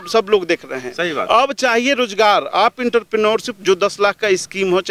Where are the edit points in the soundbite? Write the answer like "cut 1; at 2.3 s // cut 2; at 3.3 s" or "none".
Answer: none